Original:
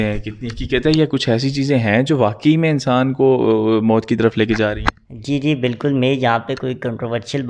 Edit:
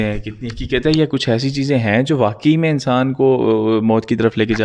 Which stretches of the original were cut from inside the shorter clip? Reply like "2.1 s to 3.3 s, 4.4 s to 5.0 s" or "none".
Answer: none